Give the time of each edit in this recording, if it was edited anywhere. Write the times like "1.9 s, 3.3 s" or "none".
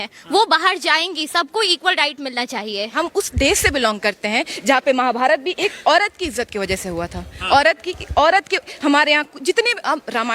2.9 s